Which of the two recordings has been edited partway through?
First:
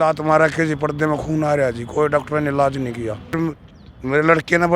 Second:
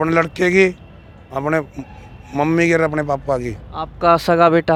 first; 1 cut; at 3.4 s

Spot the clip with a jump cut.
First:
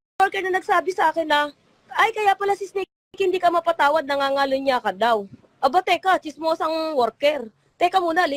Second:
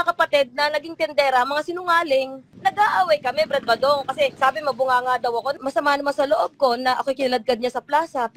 second; 3 cuts; at 2.5 s, 4.3 s, 5.6 s

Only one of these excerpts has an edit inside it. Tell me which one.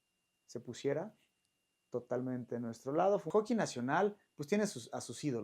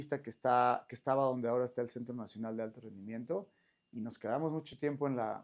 first; 1 cut; at 3.3 s

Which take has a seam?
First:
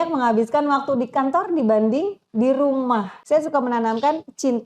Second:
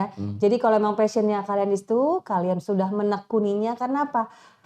first; 1 cut; at 3.1 s

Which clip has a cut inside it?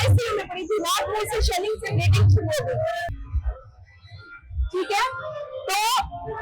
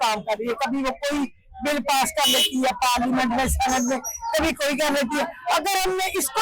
first; 1 cut; at 3.1 s

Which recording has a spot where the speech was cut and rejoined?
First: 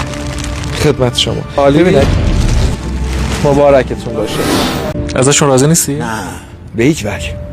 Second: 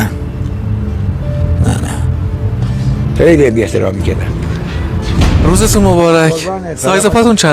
first; 1 cut; at 5.0 s

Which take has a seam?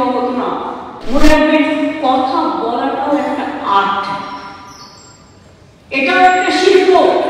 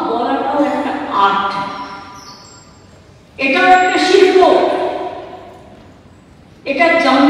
first; 1 cut; at 0.9 s

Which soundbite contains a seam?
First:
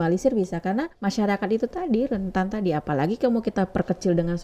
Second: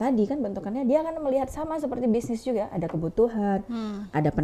first; 1 cut; at 0.9 s

